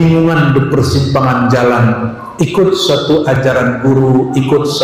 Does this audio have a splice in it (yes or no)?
no